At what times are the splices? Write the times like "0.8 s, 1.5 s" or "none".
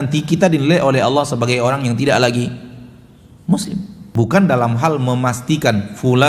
4.0 s